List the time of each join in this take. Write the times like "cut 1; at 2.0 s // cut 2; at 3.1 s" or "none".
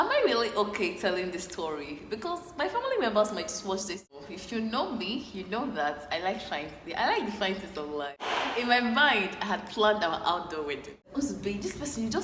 cut 1; at 4.1 s // cut 2; at 8.3 s // cut 3; at 11.1 s